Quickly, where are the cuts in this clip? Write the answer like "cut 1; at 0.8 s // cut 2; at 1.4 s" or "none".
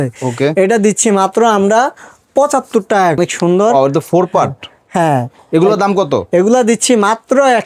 cut 1; at 3.2 s